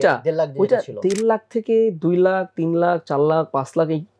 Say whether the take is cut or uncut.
uncut